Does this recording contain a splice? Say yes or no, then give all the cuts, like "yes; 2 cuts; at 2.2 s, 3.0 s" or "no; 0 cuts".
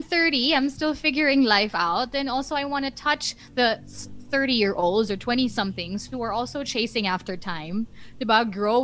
no; 0 cuts